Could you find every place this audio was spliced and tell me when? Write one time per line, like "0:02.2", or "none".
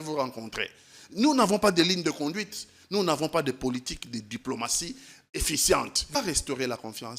0:06.2